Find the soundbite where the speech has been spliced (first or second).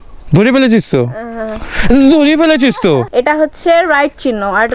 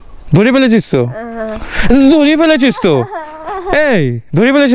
first